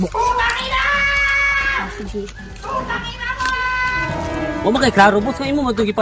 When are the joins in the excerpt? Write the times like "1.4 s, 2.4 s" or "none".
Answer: 4.0 s